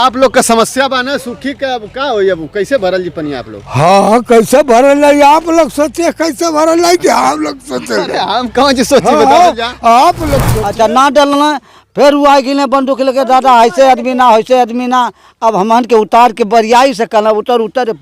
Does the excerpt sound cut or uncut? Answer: cut